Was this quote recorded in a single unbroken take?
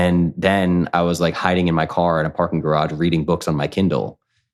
yes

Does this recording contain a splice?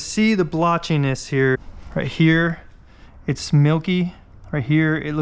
yes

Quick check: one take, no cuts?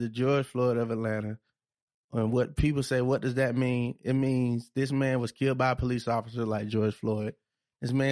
yes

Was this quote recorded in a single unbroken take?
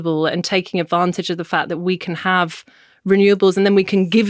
yes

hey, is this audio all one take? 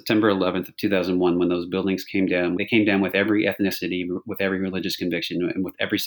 yes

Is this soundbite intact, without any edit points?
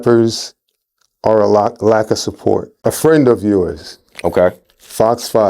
no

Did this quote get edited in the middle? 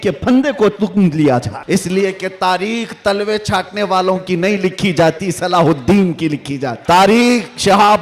yes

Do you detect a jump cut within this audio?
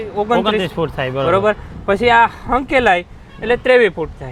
no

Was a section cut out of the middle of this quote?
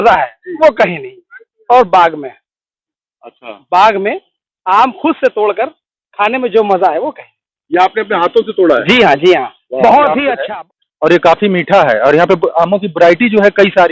yes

